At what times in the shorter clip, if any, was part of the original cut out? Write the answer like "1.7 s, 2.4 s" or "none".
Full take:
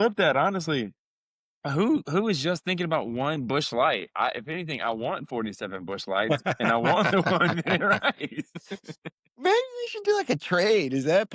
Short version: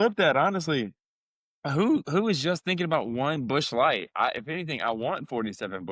none